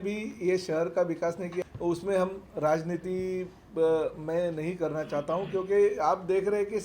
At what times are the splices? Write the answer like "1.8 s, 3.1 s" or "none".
1.6 s